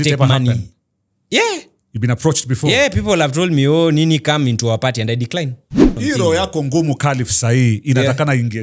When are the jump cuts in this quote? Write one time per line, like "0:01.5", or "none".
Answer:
0:05.9